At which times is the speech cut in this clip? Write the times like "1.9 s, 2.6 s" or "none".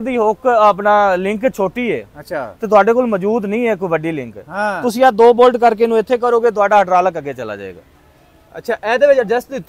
none